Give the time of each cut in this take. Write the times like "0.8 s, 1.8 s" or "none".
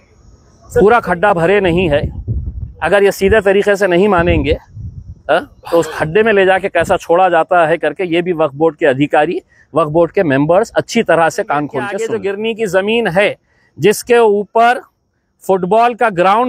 12.0 s